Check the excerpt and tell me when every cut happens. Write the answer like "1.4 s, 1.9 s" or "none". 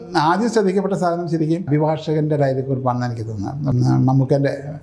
1.7 s, 3.7 s